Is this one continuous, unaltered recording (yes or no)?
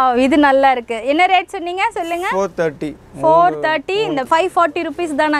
no